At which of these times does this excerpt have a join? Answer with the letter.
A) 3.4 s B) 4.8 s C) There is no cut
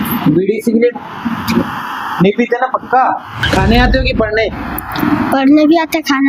A